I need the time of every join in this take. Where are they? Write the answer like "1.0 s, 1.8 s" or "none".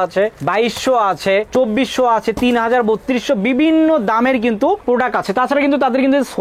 none